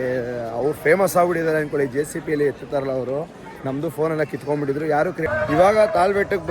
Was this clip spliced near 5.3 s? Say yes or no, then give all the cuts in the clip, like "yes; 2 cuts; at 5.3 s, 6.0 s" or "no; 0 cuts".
yes; 1 cut; at 5.3 s